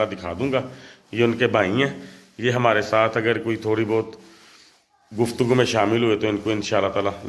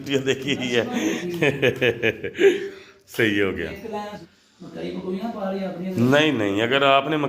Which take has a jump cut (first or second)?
second